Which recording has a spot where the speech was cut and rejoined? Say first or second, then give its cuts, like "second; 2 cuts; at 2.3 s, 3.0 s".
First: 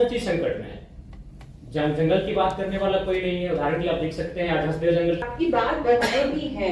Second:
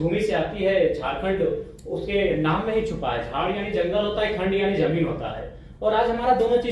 first; 1 cut; at 5.2 s